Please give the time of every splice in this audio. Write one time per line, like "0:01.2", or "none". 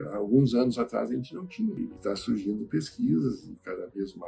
0:01.8